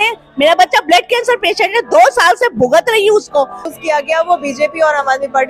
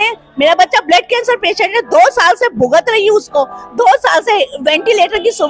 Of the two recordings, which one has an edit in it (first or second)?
first